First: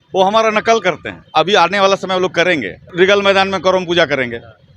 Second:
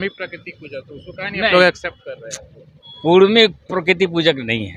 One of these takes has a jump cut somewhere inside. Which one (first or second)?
first